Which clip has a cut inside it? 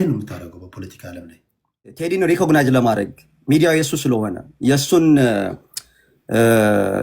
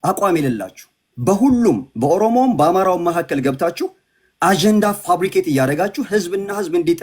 first; 1 cut; at 2.1 s

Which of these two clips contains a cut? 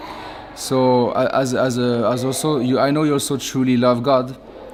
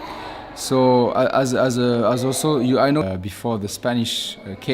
second; 1 cut; at 3.0 s

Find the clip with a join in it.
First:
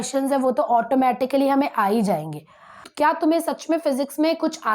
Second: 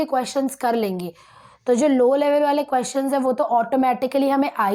first; 1 cut; at 2.9 s

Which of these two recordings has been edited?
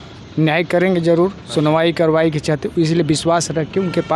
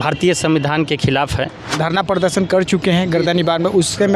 second; 1 cut; at 1.7 s

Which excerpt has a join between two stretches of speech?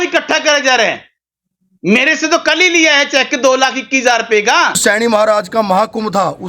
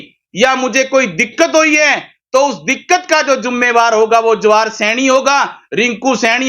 first; 1 cut; at 4.8 s

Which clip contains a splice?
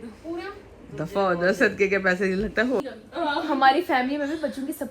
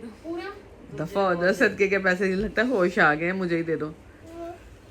first; 1 cut; at 2.8 s

